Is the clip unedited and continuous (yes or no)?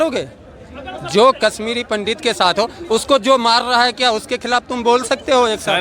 yes